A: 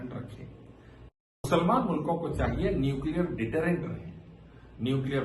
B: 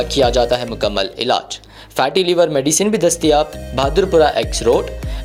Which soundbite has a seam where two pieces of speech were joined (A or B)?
A